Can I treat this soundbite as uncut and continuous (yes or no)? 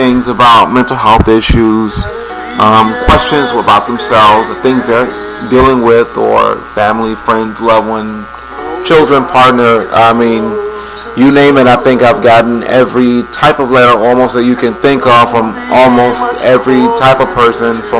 yes